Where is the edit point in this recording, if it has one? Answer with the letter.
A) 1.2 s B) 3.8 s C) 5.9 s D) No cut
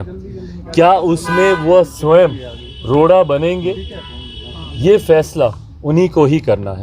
D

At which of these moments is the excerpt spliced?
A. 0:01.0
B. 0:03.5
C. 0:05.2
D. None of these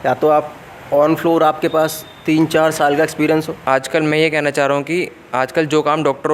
B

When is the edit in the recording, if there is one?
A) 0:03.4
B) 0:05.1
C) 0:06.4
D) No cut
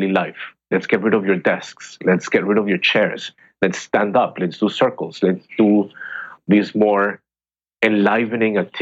C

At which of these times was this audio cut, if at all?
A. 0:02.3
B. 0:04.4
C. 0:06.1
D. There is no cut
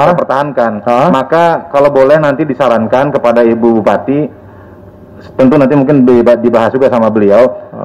D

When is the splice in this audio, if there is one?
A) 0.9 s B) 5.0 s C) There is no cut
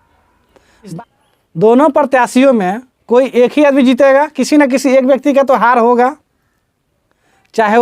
A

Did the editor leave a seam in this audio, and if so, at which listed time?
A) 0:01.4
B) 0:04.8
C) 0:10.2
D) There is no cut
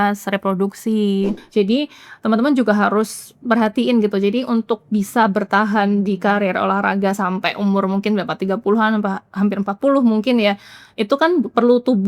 A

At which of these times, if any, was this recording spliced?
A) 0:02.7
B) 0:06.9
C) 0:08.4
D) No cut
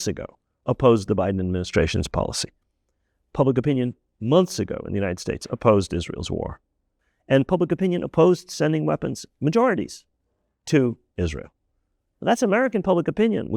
B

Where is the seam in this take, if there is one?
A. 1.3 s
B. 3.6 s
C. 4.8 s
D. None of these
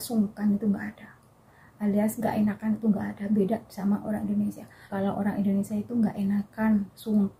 C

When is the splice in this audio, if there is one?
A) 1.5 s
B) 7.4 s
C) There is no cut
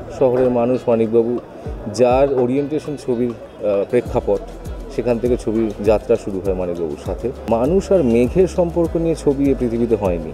B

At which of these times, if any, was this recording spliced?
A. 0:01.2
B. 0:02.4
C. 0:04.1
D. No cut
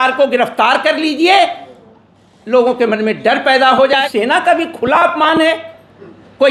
C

